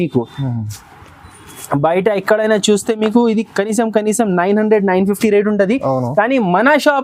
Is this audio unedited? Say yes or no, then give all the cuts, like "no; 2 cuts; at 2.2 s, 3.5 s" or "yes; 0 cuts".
yes; 0 cuts